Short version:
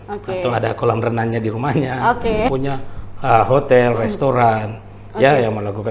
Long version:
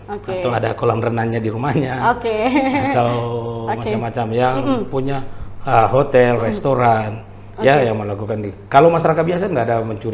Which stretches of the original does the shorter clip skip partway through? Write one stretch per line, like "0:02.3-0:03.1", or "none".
0:02.5-0:04.9